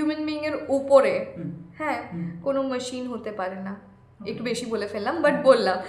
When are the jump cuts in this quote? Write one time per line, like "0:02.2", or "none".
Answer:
none

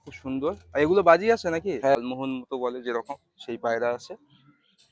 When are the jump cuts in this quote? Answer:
0:02.0

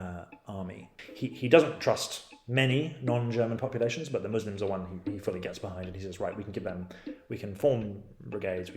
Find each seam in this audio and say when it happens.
0:01.0

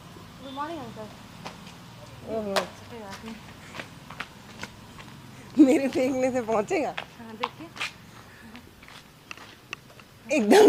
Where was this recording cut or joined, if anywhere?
none

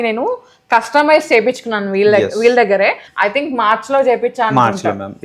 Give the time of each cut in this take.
0:03.0

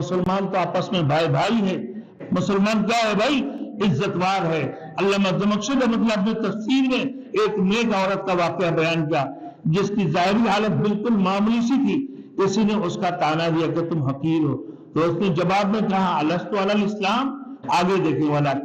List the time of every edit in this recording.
0:02.1
0:17.5

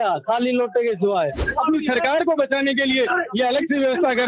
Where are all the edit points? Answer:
0:01.4

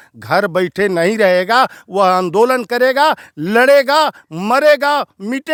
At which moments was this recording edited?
none

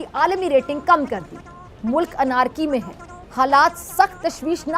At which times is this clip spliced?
0:03.2

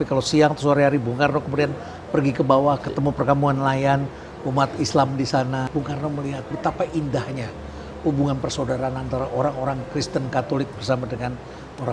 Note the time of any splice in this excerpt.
0:05.7

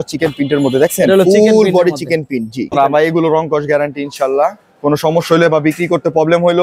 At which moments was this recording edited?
0:02.7

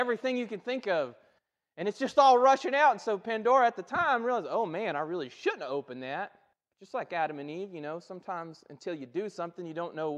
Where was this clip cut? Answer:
0:08.6

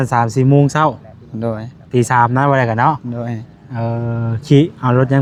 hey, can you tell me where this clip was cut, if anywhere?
none

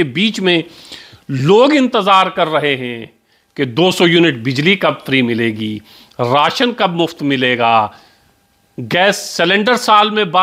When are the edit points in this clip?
none

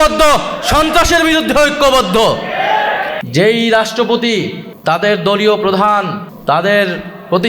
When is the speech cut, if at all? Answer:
0:03.2
0:04.6
0:06.2

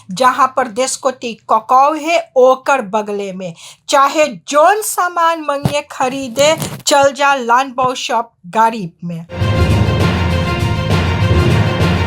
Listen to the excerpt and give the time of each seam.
0:09.4

